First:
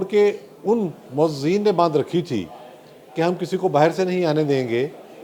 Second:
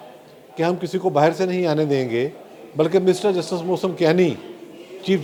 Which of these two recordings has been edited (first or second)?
first